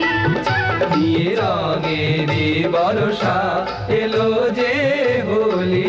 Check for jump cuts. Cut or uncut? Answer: uncut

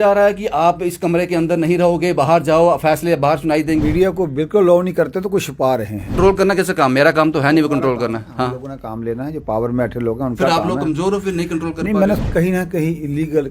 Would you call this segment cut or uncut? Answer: cut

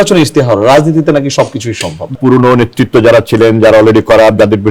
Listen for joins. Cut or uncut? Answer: cut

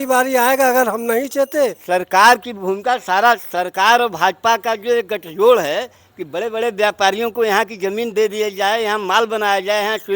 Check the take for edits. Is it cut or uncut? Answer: cut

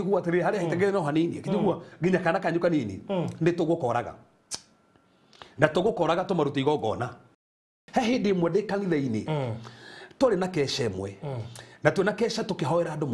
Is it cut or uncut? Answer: cut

